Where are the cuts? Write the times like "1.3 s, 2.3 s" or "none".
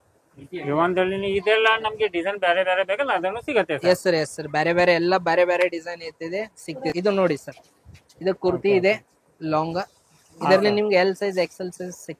6.9 s